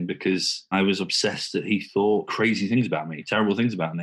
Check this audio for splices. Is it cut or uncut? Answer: cut